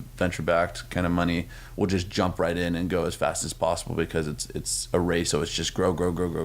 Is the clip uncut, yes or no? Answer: no